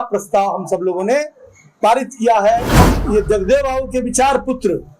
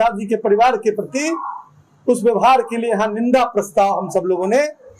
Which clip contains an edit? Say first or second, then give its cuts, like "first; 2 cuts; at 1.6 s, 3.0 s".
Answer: first; 1 cut; at 2.8 s